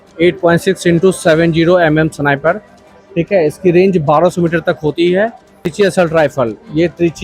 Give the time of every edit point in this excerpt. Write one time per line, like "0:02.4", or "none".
0:05.7